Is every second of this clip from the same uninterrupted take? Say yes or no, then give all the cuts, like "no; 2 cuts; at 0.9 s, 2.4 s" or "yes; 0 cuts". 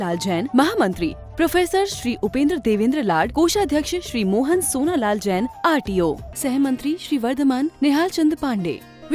yes; 0 cuts